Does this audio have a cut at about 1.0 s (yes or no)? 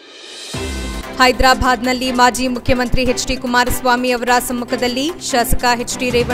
yes